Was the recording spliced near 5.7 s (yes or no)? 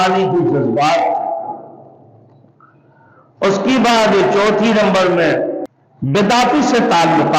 yes